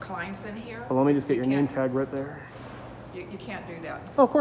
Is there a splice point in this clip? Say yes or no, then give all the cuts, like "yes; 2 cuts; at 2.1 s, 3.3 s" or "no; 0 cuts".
yes; 1 cut; at 2.5 s